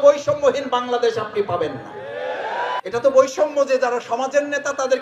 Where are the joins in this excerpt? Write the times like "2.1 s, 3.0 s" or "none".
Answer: 2.8 s